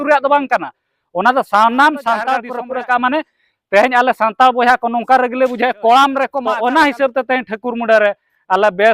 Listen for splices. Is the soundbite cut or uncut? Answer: cut